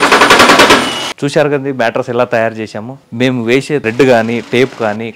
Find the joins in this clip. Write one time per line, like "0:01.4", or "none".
0:01.1